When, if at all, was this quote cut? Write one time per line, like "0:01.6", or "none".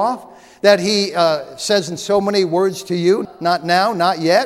0:03.3